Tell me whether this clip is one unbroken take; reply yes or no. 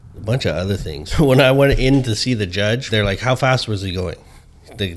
no